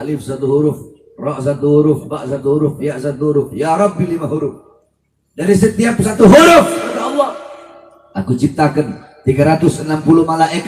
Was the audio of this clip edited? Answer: no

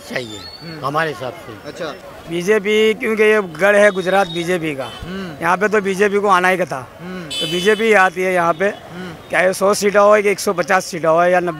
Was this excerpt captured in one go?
no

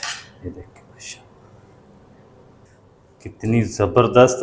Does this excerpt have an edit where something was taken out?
yes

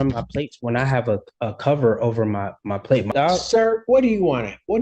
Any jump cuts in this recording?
yes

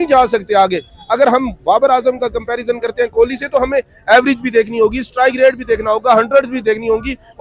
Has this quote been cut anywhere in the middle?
no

